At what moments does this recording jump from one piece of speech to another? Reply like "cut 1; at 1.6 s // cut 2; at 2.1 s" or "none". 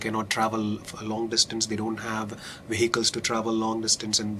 none